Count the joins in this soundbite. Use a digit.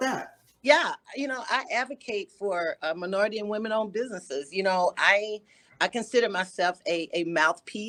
0